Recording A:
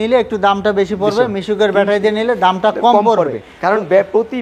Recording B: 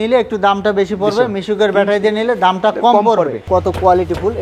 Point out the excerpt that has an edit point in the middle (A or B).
B